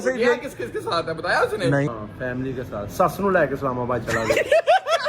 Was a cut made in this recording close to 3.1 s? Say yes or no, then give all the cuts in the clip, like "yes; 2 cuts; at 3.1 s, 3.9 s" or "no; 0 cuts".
no; 1 cut; at 1.9 s